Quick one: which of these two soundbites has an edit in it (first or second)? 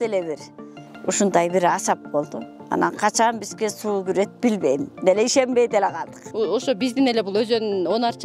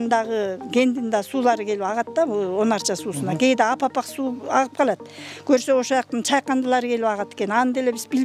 first